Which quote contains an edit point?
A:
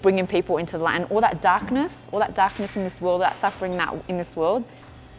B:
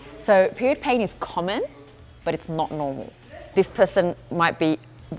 B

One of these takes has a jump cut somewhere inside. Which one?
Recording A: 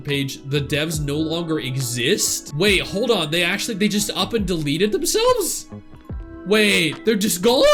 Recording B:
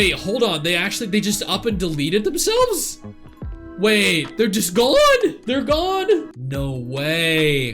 B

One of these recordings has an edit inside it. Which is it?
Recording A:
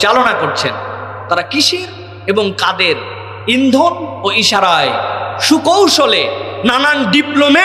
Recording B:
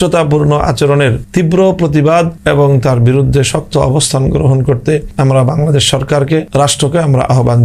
B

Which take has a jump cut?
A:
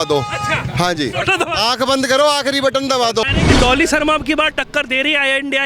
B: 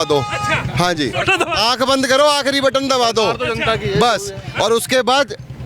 A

